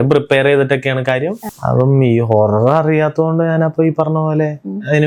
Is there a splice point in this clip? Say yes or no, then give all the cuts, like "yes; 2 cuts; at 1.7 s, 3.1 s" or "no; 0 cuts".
yes; 1 cut; at 1.5 s